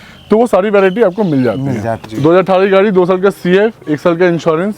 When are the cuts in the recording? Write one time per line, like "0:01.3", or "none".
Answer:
0:02.0